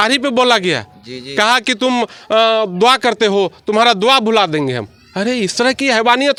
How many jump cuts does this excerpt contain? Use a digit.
0